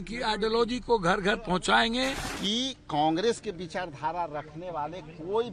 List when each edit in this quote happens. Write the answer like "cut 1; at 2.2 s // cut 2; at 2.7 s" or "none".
cut 1; at 2.3 s